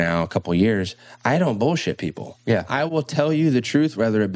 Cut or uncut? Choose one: cut